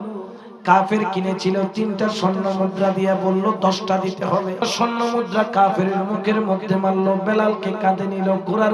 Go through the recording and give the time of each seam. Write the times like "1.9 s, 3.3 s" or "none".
4.7 s